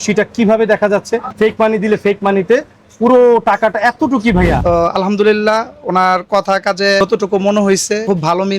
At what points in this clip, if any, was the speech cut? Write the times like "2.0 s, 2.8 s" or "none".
1.3 s, 4.6 s